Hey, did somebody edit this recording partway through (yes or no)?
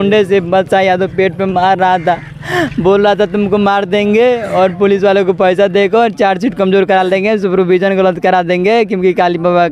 no